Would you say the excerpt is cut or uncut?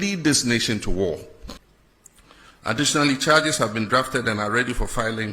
cut